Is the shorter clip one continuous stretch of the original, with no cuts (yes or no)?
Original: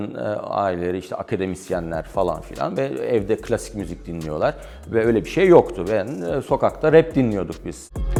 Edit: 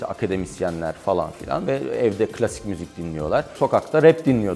no